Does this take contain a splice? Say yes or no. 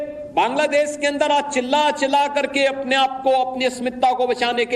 yes